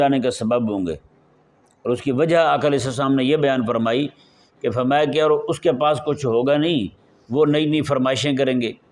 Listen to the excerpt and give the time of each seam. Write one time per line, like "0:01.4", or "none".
none